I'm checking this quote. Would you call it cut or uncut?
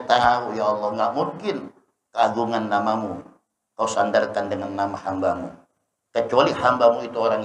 uncut